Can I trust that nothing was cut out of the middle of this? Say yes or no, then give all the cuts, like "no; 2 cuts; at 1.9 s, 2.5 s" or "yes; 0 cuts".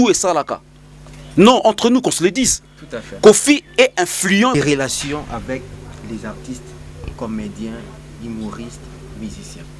no; 1 cut; at 4.5 s